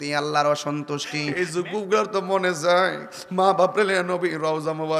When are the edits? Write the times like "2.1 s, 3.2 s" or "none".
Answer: 1.2 s